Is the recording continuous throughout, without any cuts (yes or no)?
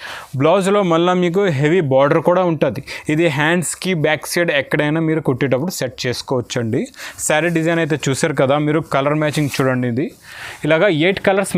yes